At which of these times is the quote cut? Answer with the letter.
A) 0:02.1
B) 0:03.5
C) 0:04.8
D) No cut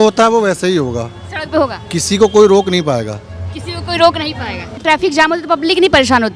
C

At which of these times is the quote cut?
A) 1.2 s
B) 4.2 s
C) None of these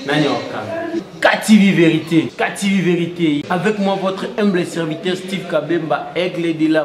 C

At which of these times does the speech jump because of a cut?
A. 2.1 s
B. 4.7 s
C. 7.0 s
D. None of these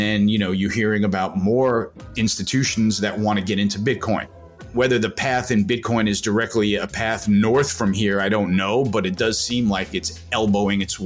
B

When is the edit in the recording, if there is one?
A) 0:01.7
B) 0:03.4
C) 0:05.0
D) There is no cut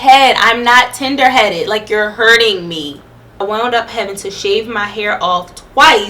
B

